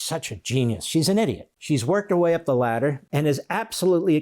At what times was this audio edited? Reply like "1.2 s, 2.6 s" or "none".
1.5 s, 3.0 s